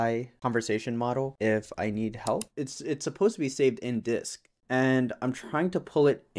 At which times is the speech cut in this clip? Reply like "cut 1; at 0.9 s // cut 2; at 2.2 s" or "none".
cut 1; at 2.4 s // cut 2; at 4.5 s